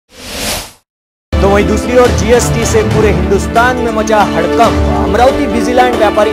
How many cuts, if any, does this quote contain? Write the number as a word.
one